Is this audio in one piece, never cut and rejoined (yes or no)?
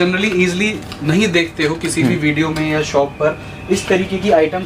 yes